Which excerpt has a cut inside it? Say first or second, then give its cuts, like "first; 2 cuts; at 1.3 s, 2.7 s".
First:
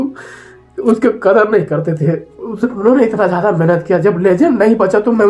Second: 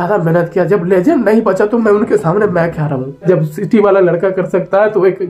second; 1 cut; at 3.2 s